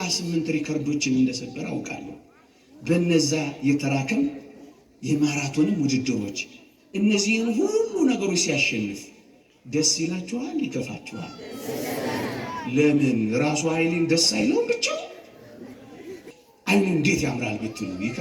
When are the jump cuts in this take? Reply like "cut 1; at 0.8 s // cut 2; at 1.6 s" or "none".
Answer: cut 1; at 16.3 s